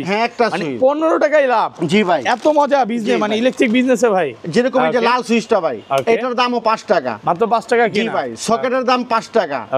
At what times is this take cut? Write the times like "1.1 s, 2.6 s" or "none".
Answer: none